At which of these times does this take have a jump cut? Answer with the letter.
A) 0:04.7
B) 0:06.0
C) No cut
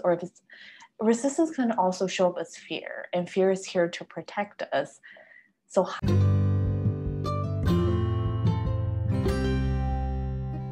B